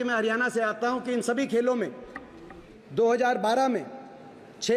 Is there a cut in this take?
yes; 1 cut; at 2.7 s

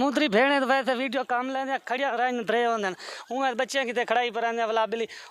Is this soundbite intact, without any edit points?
yes; 0 cuts

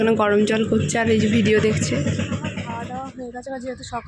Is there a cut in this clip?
yes; 1 cut; at 2.6 s

